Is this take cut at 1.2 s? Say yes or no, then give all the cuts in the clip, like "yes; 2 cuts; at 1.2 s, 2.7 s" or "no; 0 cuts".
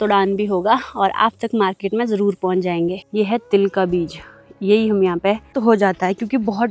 no; 2 cuts; at 3.0 s, 5.6 s